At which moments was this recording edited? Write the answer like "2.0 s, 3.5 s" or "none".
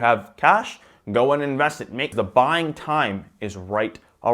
2.1 s